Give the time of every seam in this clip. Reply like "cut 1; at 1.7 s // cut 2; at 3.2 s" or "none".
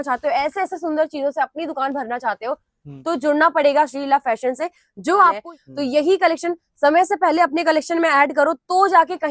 cut 1; at 5.5 s